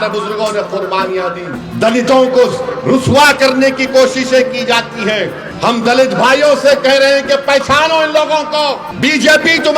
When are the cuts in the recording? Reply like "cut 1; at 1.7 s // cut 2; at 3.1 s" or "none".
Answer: cut 1; at 1.6 s // cut 2; at 5.4 s // cut 3; at 8.9 s